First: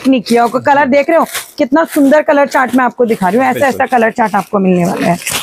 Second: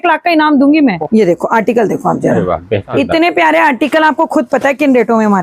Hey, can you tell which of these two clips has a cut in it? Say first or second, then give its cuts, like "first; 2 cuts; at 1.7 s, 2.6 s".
second; 2 cuts; at 1.0 s, 2.9 s